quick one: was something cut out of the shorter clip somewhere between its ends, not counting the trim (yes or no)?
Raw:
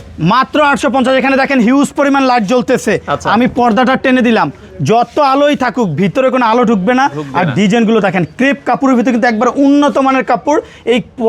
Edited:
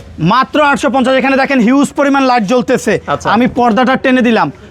no